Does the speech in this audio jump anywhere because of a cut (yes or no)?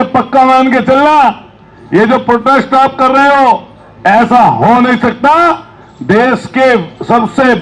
no